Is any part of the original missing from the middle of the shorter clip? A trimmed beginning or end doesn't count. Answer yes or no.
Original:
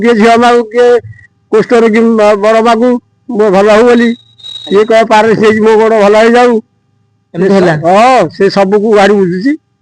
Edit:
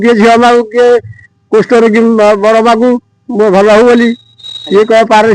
no